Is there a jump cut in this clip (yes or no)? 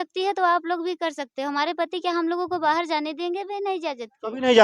no